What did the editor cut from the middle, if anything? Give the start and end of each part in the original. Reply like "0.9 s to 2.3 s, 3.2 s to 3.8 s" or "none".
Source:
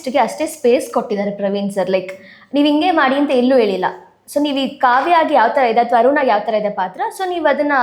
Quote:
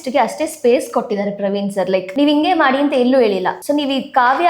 2.1 s to 2.5 s, 3.9 s to 4.2 s